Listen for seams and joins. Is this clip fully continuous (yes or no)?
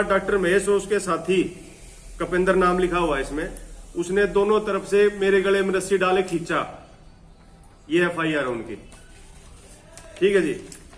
yes